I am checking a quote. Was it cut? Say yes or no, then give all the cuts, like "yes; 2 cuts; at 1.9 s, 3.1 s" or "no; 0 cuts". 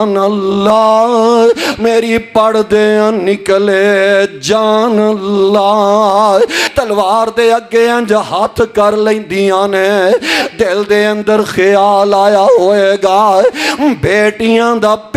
yes; 1 cut; at 6.7 s